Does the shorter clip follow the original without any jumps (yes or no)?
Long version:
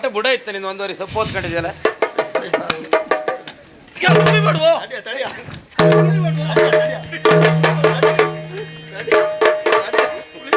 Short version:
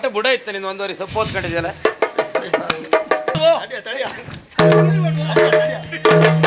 no